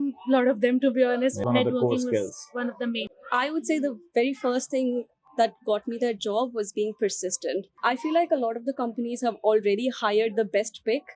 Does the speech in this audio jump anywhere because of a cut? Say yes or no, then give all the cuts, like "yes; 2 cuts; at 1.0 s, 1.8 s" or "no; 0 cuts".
yes; 3 cuts; at 1.4 s, 3.1 s, 7.7 s